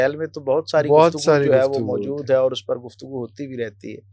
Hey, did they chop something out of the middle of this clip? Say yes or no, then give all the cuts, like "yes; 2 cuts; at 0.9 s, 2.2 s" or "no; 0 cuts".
no; 0 cuts